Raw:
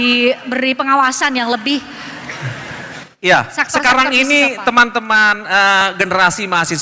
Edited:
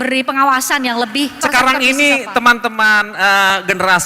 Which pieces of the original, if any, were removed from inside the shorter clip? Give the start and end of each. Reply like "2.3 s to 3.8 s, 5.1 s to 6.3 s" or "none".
1.9 s to 3.7 s